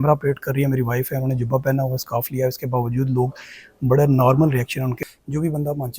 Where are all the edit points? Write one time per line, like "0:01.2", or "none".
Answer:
0:05.0

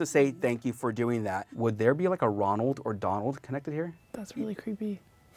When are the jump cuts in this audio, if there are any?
0:01.5
0:04.0

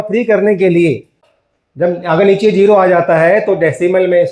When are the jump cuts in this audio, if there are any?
0:01.2

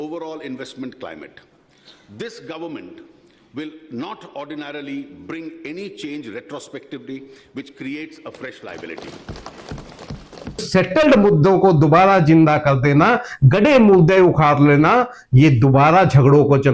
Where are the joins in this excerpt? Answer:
0:10.6

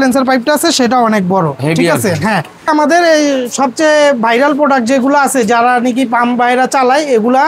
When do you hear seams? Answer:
0:02.7

